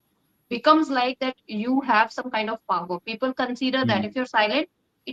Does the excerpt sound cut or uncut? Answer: uncut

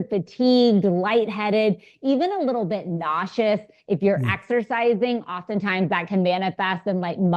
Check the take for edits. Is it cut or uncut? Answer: uncut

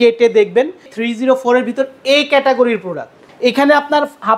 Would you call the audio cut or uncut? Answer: cut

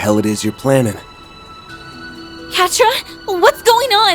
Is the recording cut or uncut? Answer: cut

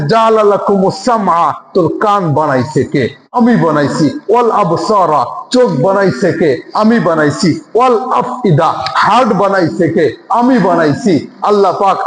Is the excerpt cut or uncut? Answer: uncut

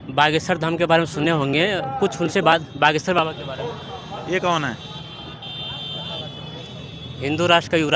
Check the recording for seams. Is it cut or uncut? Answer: uncut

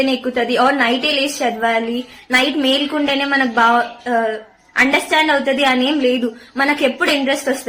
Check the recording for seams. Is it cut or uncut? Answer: uncut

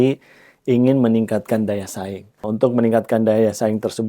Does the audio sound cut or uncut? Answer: cut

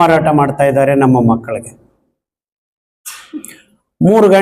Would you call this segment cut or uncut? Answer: uncut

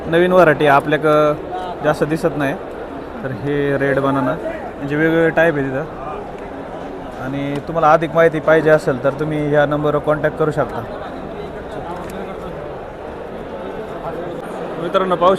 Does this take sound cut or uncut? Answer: uncut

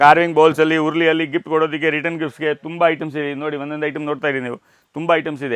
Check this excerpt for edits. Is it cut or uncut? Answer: uncut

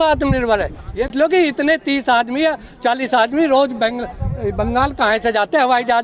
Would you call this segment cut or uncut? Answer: cut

